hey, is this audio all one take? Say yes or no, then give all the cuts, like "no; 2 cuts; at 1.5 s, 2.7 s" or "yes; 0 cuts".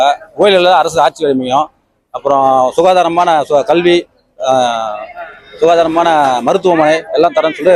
yes; 0 cuts